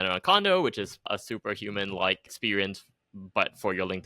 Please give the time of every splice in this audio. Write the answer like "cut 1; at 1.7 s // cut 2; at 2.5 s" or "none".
cut 1; at 1.1 s // cut 2; at 2.3 s

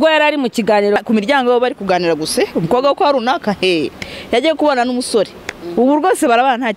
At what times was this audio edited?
cut 1; at 1.0 s

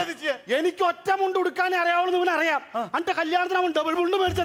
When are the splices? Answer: none

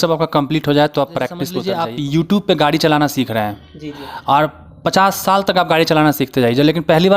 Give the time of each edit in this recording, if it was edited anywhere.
cut 1; at 1.5 s

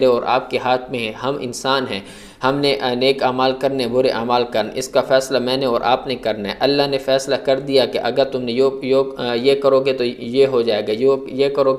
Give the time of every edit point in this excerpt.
none

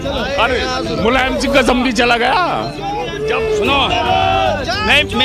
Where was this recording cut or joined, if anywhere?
none

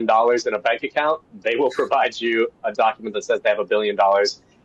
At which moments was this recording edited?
none

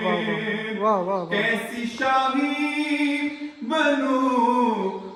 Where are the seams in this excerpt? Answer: none

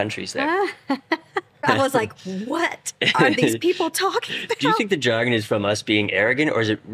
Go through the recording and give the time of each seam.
cut 1; at 1.6 s

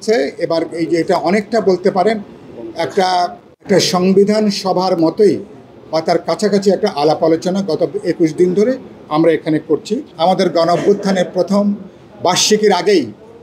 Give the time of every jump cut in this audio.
cut 1; at 10.0 s

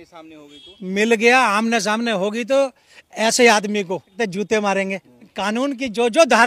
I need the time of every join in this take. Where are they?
cut 1; at 4.1 s // cut 2; at 5.3 s

